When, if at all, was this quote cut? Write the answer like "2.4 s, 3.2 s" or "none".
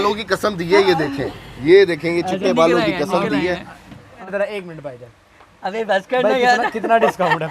4.2 s

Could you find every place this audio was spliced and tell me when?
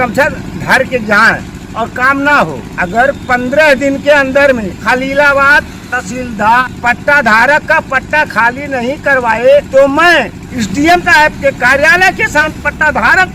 1.6 s, 2.7 s, 4.7 s, 6.6 s, 9.7 s, 10.4 s, 12.5 s

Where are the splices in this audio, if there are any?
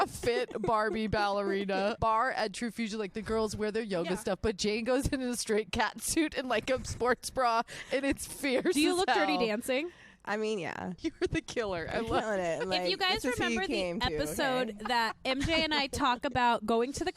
2.0 s, 10.8 s

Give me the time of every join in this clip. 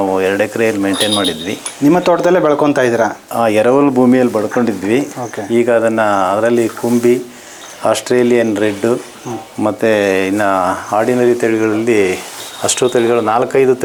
none

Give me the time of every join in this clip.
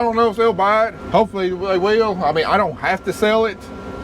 1.0 s

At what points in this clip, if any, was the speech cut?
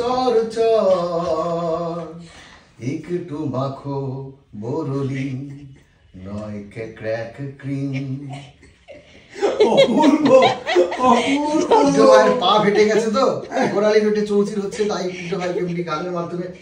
none

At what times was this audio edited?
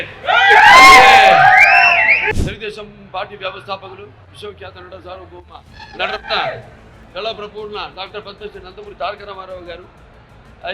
2.2 s

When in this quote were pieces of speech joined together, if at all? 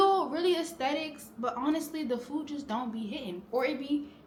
none

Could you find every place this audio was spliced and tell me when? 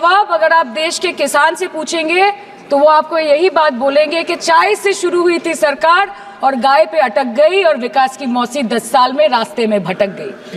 none

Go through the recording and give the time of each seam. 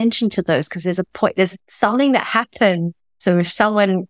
1.6 s, 3.1 s

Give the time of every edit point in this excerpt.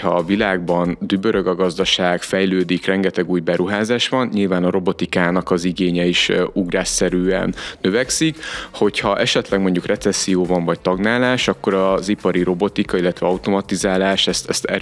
none

